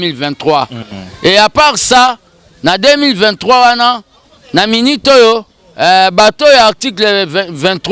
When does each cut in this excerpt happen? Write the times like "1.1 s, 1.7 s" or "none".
none